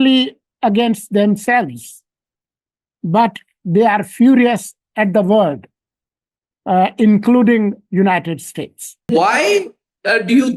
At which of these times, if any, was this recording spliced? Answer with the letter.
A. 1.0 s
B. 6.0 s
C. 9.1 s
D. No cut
C